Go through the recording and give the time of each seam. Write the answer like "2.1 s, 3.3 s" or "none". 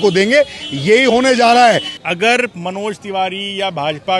2.0 s